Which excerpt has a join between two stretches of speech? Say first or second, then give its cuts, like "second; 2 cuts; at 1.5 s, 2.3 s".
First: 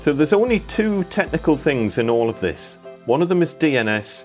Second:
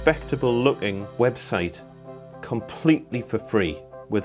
second; 1 cut; at 1.0 s